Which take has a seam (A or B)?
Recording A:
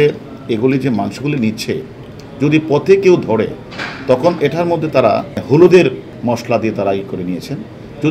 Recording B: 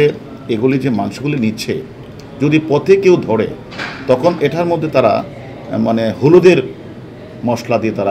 A